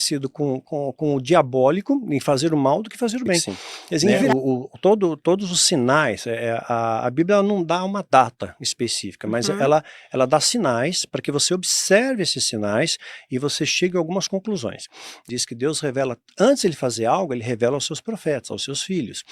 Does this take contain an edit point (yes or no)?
yes